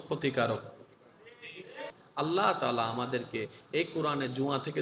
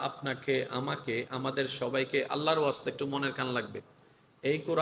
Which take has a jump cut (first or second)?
first